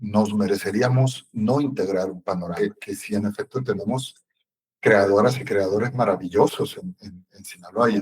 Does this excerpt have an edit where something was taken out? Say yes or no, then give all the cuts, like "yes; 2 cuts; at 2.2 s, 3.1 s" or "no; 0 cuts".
yes; 1 cut; at 2.9 s